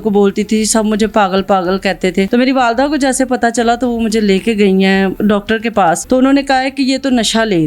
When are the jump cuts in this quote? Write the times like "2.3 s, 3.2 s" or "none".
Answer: 2.3 s, 5.6 s